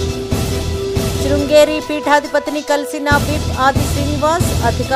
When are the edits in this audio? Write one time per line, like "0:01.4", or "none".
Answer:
0:01.1